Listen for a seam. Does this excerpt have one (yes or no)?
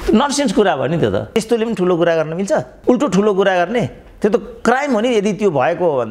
yes